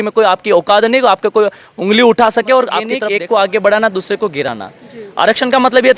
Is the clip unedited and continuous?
no; 1 cut; at 3.0 s

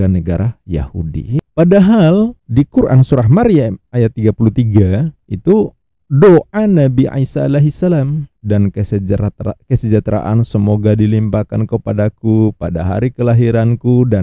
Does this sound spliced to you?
yes; 1 cut; at 1.4 s

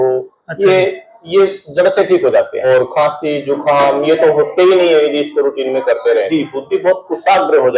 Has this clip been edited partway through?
yes; 2 cuts; at 2.7 s, 6.3 s

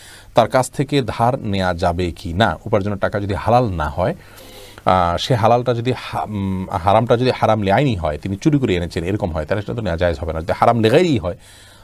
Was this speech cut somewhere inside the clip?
no; 0 cuts

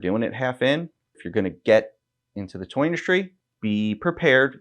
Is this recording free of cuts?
no; 2 cuts; at 1.2 s, 3.4 s

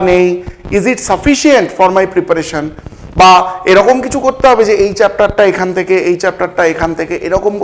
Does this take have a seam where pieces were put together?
no; 0 cuts

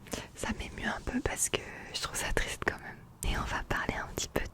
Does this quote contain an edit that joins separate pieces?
yes; 1 cut; at 3.2 s

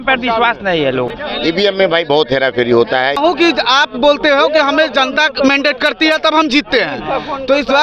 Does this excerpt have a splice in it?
yes; 2 cuts; at 1.1 s, 3.2 s

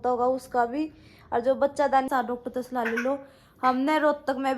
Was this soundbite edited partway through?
yes; 1 cut; at 2.1 s

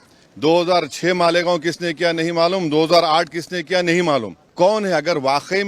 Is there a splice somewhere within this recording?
yes; 1 cut; at 4.4 s

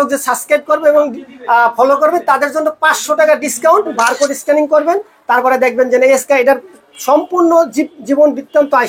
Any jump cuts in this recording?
yes; 1 cut; at 3.9 s

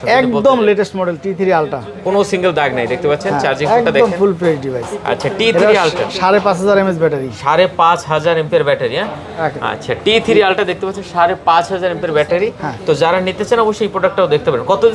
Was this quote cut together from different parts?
no; 0 cuts

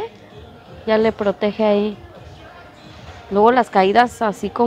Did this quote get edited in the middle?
no; 0 cuts

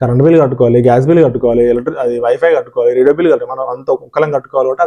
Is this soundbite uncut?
yes; 0 cuts

